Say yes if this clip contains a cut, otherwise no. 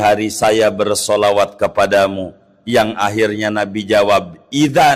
no